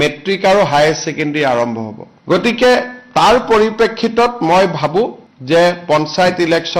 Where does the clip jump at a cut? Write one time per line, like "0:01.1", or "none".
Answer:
none